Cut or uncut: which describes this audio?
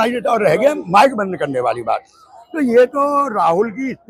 uncut